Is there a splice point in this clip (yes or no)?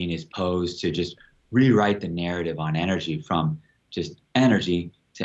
no